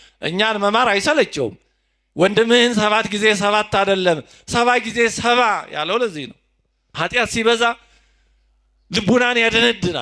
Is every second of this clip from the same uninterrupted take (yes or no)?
no